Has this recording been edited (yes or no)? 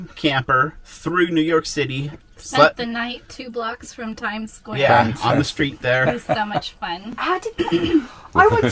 no